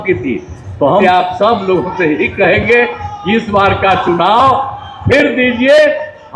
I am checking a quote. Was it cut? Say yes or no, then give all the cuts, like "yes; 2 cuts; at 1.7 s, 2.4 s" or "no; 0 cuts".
yes; 1 cut; at 1.0 s